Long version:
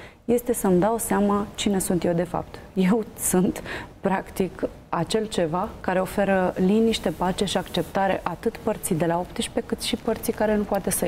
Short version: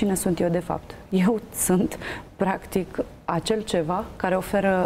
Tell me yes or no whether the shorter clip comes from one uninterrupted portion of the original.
yes